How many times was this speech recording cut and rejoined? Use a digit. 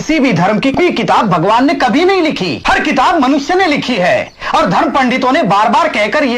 2